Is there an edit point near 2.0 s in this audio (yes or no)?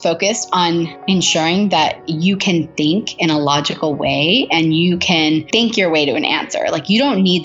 yes